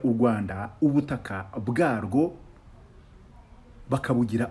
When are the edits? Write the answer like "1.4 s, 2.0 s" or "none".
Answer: none